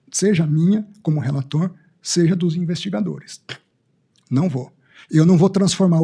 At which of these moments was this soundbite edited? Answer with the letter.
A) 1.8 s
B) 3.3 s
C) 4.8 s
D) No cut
D